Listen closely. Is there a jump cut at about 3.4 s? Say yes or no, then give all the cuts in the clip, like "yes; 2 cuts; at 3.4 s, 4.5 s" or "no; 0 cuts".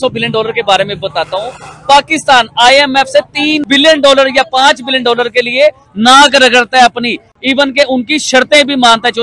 no; 0 cuts